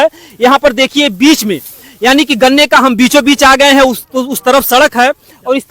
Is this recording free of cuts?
yes; 0 cuts

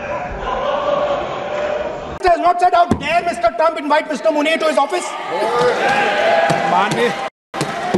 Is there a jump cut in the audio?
no; 0 cuts

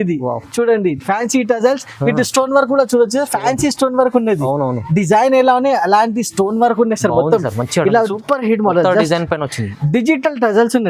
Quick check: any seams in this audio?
yes; 1 cut; at 8.1 s

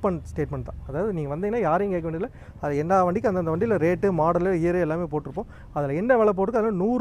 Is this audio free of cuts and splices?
yes; 0 cuts

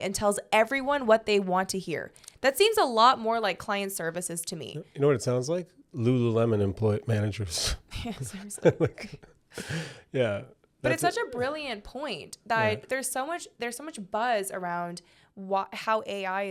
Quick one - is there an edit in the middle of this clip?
no; 0 cuts

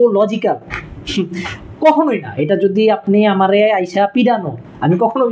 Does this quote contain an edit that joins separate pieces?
no; 0 cuts

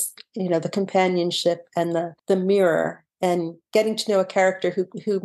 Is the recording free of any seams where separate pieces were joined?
no; 2 cuts; at 2.1 s, 3.6 s

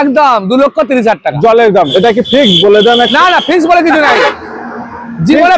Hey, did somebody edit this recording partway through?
yes; 1 cut; at 1.9 s

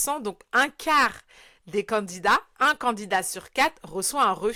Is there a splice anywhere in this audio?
no; 0 cuts

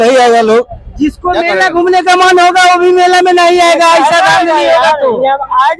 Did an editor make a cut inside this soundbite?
no; 0 cuts

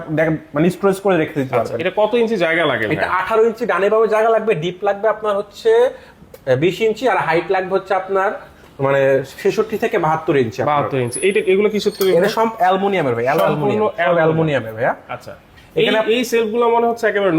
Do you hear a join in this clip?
no; 0 cuts

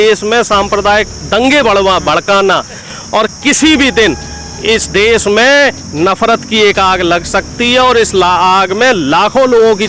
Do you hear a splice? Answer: yes; 1 cut; at 2.9 s

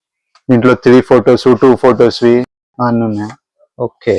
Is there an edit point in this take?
no; 0 cuts

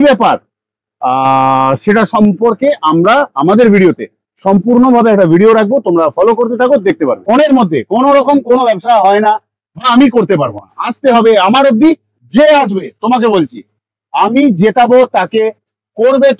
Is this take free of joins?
no; 1 cut; at 7.2 s

